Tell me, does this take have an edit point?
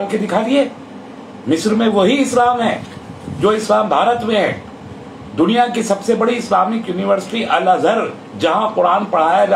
no; 0 cuts

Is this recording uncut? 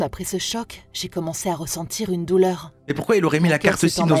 yes; 0 cuts

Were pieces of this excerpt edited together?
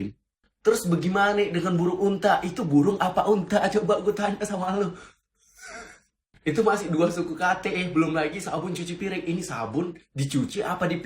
no; 0 cuts

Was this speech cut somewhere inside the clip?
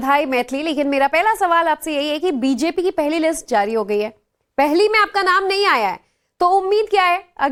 no; 0 cuts

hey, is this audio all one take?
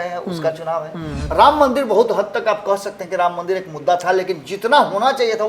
no; 1 cut; at 1.2 s

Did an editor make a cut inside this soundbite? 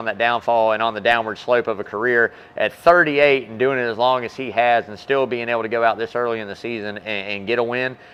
no; 0 cuts

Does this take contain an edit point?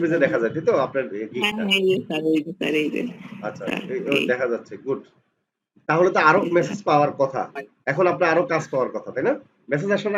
no; 0 cuts

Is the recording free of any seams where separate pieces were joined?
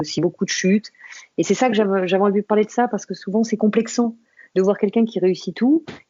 yes; 0 cuts

